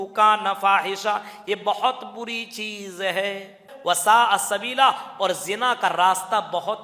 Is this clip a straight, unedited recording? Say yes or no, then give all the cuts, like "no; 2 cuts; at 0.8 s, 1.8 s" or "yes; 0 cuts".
no; 1 cut; at 3.7 s